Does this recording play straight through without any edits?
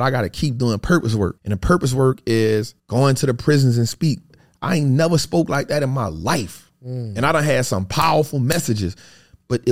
no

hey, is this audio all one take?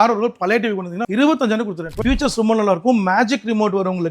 no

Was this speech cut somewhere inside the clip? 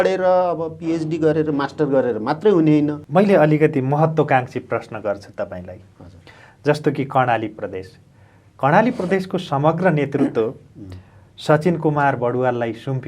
yes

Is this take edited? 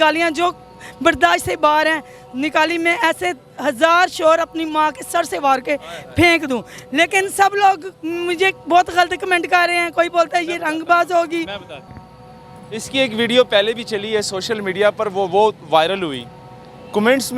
no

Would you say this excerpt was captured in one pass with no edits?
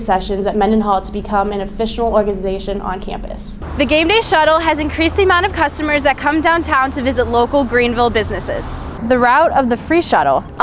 no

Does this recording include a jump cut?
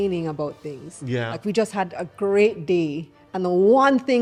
no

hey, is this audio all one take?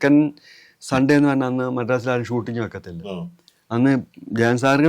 yes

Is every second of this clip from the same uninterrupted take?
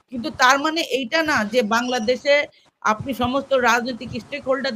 yes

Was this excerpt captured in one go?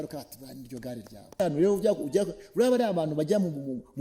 no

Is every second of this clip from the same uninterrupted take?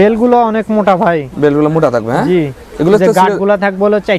yes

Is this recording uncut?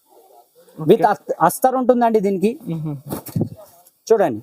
yes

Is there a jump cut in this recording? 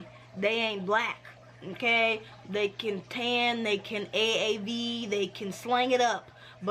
no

